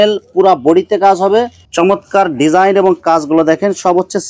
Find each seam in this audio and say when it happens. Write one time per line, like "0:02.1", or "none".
0:01.6